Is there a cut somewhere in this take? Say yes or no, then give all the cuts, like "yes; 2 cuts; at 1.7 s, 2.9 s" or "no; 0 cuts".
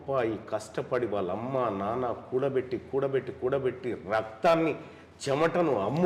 no; 0 cuts